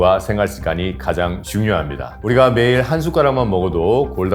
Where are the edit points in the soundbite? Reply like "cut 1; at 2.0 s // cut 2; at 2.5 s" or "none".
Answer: cut 1; at 2.1 s